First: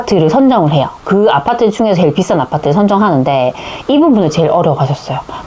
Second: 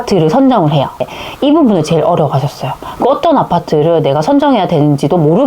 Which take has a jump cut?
second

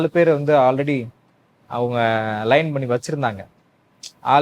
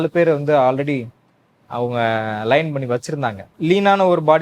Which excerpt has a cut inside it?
second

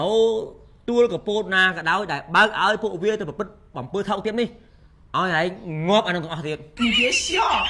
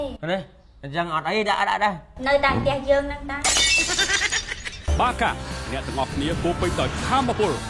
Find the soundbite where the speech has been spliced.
second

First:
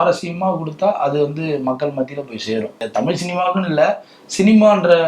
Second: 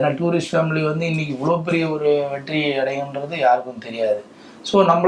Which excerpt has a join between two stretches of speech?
first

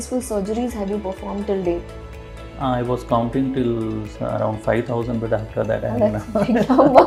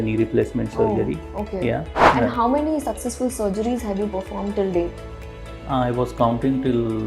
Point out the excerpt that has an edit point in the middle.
second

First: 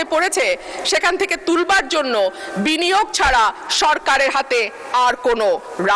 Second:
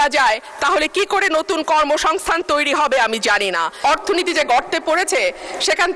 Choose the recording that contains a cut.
second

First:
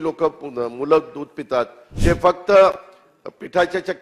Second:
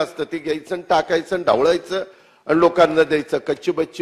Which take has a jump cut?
first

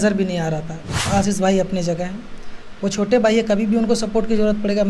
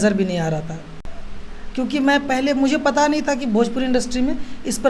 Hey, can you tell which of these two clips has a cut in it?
first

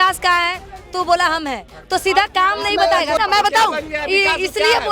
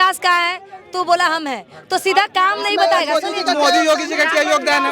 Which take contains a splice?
first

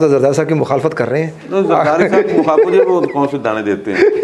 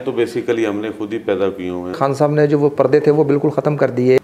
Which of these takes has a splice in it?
second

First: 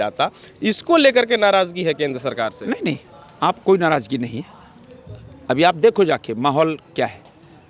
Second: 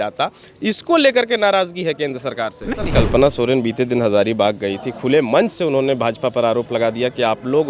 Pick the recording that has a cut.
second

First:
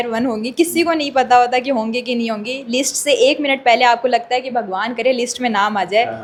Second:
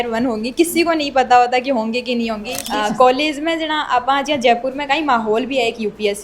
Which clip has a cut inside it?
second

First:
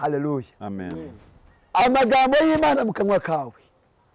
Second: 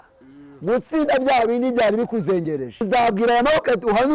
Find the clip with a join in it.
second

